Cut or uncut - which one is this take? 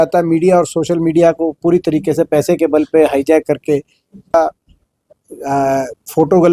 cut